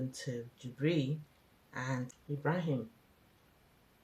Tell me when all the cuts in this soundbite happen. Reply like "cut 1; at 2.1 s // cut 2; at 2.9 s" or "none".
cut 1; at 2.2 s